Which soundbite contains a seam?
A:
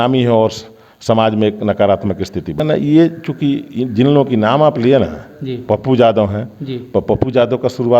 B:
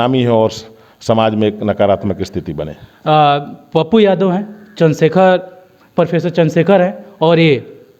A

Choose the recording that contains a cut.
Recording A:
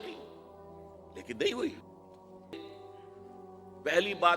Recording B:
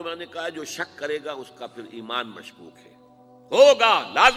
A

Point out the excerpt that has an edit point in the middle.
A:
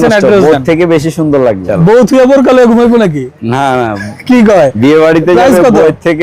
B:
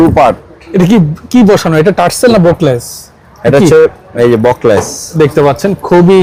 A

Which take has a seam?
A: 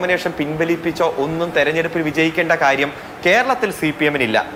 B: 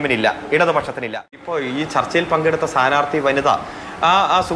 B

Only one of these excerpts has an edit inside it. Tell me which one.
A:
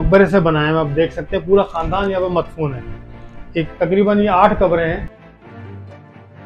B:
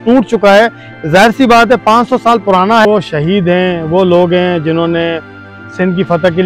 B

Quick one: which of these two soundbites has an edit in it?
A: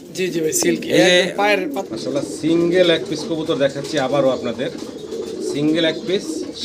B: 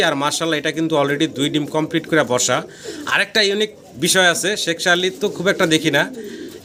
A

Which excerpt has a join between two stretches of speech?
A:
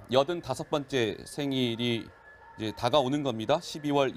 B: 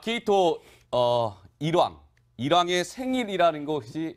A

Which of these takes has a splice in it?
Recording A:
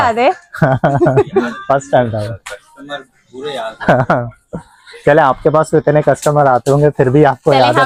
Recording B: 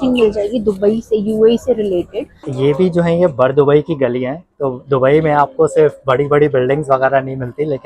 B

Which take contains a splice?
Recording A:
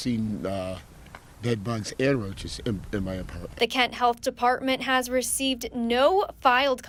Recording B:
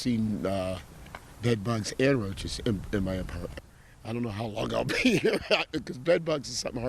B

